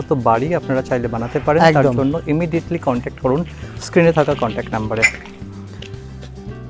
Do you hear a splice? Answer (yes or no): no